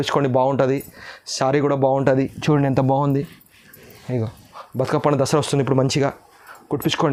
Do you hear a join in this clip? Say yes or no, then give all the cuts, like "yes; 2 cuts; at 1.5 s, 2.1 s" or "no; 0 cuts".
no; 0 cuts